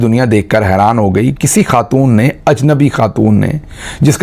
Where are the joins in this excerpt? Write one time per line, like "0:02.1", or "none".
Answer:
none